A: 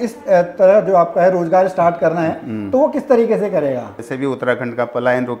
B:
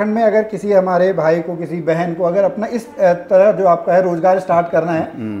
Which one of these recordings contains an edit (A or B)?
A